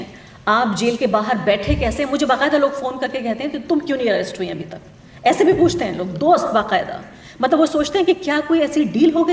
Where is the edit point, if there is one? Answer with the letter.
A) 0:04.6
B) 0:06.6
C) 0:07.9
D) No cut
D